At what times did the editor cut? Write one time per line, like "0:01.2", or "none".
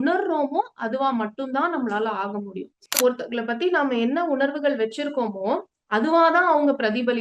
0:02.7